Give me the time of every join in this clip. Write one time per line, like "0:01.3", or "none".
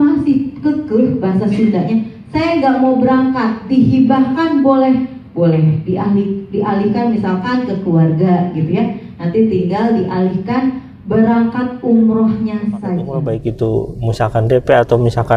0:13.2